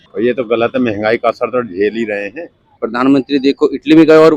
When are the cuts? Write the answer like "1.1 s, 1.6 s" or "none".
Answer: 2.8 s

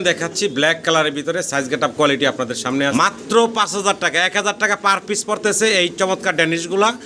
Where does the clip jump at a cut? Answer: 2.9 s

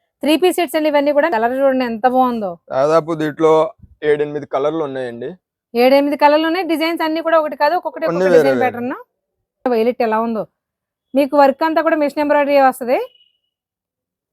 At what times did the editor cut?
1.3 s, 9.6 s

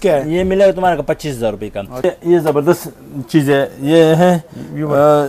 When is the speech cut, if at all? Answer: 2.0 s

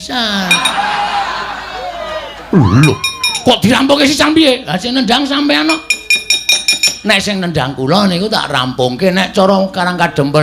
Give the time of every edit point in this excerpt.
none

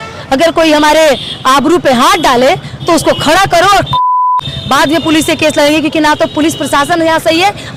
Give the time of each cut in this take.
none

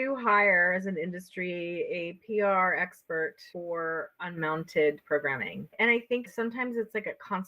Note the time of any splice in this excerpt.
6.2 s

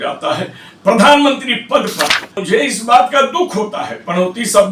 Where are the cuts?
2.4 s

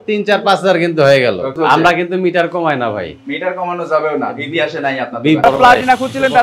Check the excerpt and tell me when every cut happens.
1.5 s, 5.4 s

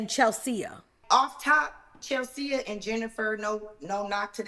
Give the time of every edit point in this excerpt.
0.9 s

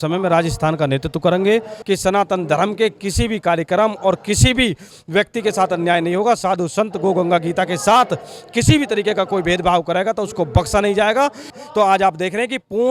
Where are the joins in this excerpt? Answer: 1.7 s, 11.5 s

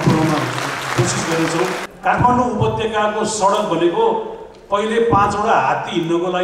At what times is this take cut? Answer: 1.9 s

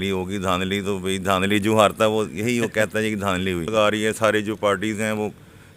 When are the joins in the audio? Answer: 3.7 s

